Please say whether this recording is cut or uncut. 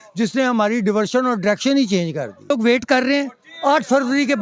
cut